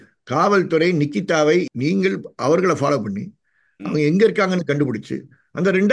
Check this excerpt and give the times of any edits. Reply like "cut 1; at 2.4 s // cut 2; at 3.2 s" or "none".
cut 1; at 1.7 s